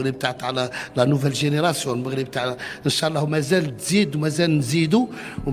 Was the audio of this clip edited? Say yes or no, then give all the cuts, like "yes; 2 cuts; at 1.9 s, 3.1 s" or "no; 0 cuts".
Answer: no; 0 cuts